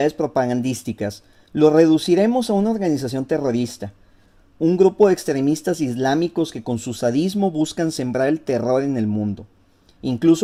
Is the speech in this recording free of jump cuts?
yes; 0 cuts

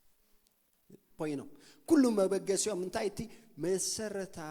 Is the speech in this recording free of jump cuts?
no; 1 cut; at 1.1 s

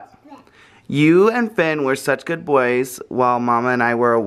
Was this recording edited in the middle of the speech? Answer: no; 0 cuts

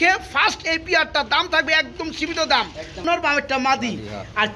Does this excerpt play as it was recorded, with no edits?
no; 1 cut; at 3.0 s

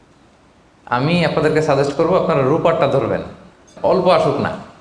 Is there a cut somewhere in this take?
yes; 1 cut; at 3.7 s

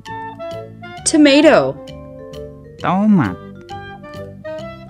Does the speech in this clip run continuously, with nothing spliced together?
no; 1 cut; at 1.0 s

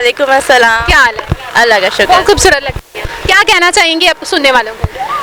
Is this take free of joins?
yes; 0 cuts

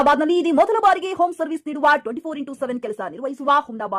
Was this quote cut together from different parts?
no; 0 cuts

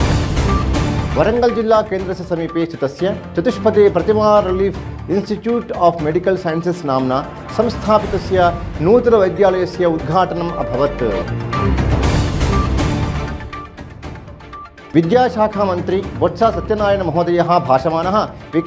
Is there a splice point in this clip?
yes; 1 cut; at 1.1 s

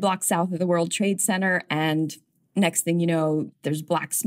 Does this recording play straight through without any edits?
no; 2 cuts; at 2.4 s, 3.5 s

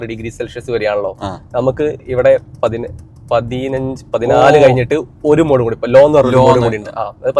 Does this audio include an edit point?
no; 0 cuts

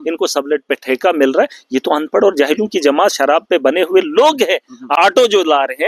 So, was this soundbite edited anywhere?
yes; 1 cut; at 4.9 s

